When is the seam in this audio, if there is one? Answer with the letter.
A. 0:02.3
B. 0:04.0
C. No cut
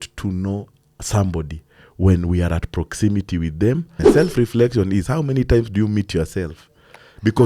B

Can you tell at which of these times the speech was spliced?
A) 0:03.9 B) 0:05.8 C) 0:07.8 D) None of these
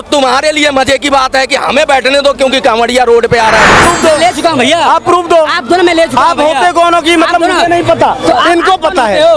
A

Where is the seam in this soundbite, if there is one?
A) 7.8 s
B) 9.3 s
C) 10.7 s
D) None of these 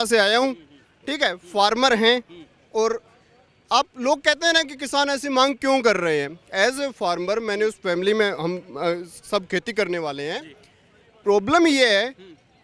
D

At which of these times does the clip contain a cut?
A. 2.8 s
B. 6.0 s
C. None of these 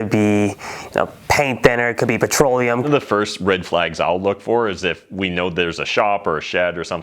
A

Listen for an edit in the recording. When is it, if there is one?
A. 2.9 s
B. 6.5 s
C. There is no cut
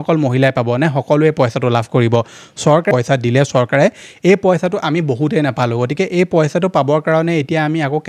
A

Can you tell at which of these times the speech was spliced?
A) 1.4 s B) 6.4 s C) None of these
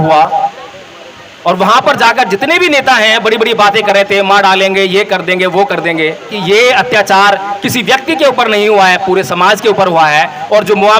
B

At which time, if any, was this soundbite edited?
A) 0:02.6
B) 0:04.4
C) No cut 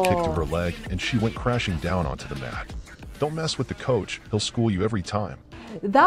C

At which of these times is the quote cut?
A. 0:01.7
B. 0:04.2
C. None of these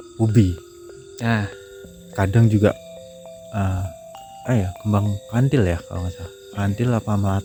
C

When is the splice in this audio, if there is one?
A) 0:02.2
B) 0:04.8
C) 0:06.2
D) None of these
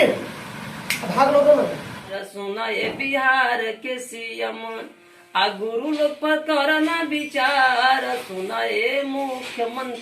A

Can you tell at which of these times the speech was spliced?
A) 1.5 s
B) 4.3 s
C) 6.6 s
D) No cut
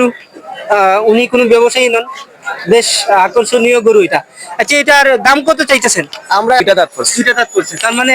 C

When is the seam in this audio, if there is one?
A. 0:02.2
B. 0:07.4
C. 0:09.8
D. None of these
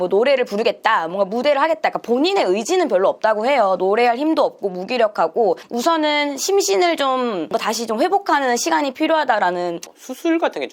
C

